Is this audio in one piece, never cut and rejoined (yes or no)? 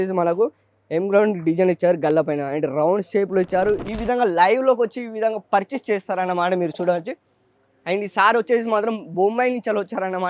no